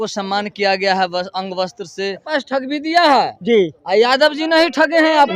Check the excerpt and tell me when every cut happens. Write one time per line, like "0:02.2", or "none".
0:02.3